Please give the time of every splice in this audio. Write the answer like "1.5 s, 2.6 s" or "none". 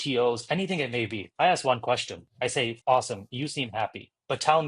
1.2 s, 2.7 s